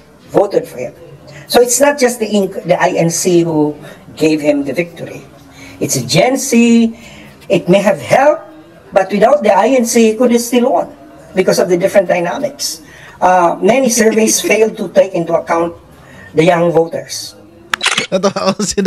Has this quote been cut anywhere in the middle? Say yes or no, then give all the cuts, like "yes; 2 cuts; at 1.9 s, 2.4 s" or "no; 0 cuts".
no; 0 cuts